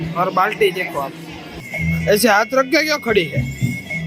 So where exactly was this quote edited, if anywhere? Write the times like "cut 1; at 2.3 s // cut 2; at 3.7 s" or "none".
cut 1; at 1.6 s